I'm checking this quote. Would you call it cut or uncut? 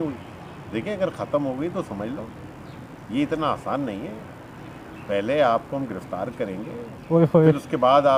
uncut